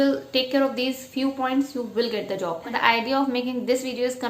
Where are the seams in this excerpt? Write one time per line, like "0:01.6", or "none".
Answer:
0:02.6